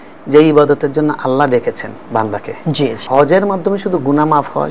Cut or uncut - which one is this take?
cut